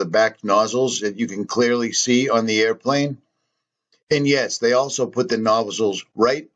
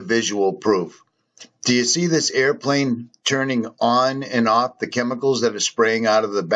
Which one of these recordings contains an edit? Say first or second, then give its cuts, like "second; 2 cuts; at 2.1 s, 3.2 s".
second; 1 cut; at 5.1 s